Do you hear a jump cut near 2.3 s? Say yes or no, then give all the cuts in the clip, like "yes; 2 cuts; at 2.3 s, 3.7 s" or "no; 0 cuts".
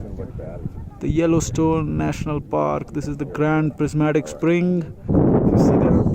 no; 1 cut; at 5.1 s